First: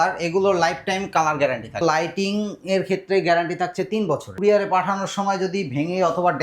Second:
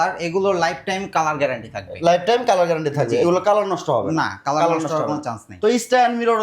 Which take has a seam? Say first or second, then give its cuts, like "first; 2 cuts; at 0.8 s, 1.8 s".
first; 2 cuts; at 1.8 s, 4.3 s